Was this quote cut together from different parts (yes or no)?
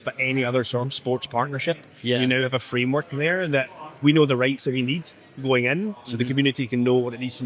no